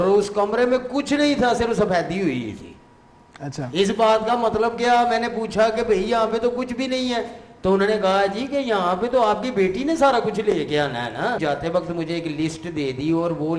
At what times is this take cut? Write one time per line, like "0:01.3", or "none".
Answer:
0:11.4

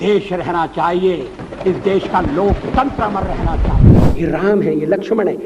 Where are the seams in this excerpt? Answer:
0:03.9

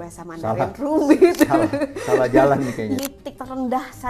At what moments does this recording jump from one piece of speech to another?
0:03.0

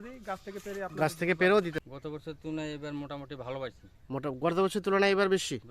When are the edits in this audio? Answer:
0:01.7

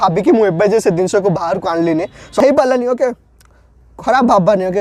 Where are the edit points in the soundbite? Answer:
0:02.4

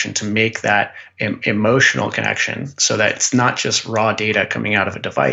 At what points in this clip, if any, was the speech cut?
none

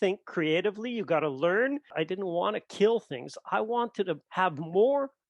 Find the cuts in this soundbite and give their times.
0:01.9

